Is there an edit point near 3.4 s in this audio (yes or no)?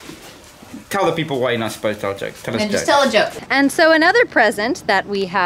yes